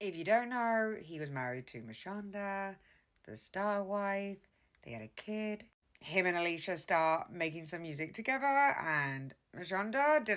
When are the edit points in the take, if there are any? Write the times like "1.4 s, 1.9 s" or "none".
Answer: none